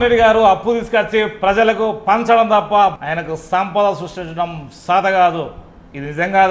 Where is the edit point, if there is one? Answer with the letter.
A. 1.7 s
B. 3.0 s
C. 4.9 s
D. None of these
B